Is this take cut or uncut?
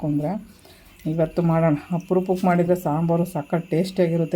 uncut